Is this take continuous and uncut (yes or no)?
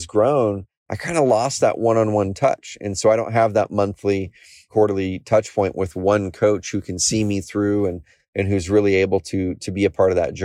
no